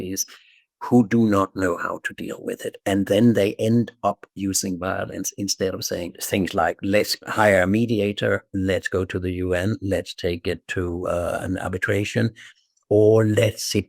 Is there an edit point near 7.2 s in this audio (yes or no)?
yes